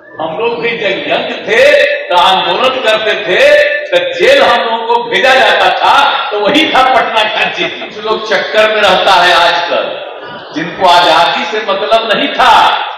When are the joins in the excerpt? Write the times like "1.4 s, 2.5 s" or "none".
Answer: 7.9 s

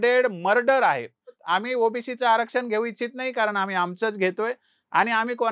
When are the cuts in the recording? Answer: 1.4 s

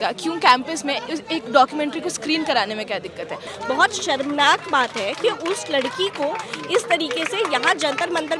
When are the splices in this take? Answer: 3.4 s

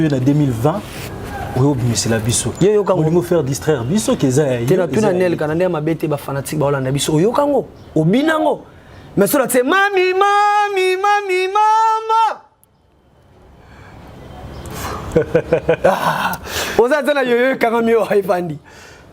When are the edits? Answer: none

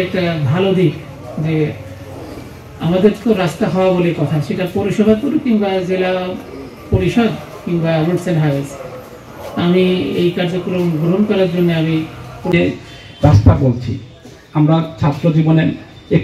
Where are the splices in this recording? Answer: 12.5 s

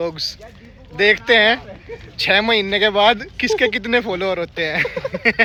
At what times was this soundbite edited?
none

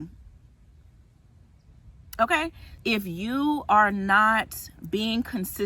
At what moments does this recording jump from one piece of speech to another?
2.6 s

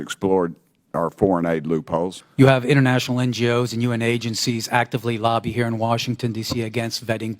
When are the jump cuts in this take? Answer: 2.2 s

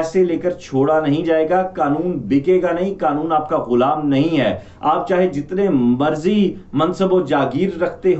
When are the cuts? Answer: none

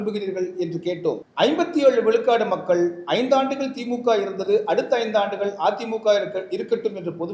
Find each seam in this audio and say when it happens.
1.3 s

